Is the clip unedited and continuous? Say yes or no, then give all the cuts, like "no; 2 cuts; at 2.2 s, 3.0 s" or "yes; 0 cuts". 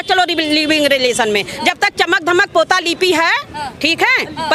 yes; 0 cuts